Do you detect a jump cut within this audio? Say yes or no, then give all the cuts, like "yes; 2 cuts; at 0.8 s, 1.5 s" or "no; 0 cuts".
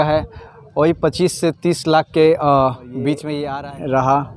yes; 1 cut; at 3.3 s